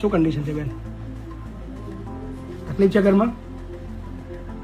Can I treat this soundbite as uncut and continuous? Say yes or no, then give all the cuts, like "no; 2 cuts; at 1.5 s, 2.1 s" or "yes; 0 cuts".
yes; 0 cuts